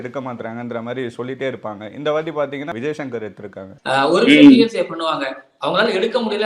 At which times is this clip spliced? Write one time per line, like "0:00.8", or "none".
0:02.7
0:03.7